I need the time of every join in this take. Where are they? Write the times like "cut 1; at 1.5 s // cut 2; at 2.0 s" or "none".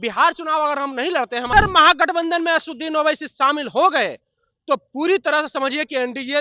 cut 1; at 1.5 s